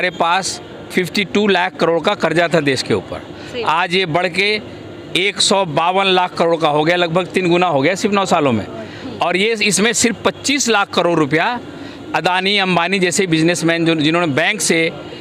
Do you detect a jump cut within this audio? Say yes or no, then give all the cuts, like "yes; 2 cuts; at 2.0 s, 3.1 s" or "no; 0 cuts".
no; 0 cuts